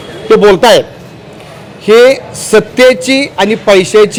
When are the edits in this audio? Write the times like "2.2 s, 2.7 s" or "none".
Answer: none